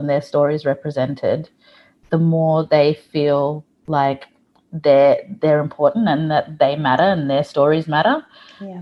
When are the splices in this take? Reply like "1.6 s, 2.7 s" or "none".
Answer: none